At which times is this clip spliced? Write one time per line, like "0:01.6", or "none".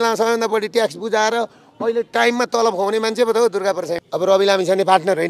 0:04.0